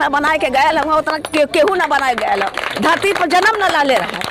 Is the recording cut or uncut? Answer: uncut